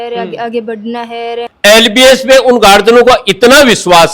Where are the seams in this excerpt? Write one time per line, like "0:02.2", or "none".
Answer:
0:01.4